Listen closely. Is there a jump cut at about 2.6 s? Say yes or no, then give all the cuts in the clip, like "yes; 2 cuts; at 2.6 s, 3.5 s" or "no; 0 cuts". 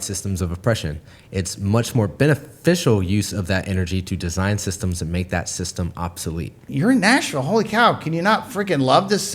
no; 1 cut; at 6.7 s